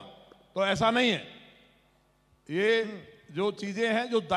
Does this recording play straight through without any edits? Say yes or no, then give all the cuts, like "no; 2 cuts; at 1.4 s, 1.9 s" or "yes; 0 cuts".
yes; 0 cuts